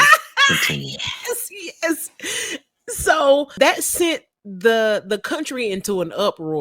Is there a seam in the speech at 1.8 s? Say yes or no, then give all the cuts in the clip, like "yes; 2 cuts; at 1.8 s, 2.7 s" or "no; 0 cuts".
no; 1 cut; at 3.5 s